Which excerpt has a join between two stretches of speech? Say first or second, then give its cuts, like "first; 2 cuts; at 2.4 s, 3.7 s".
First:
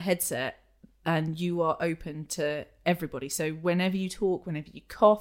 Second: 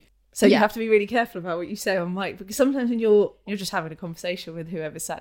second; 1 cut; at 3.4 s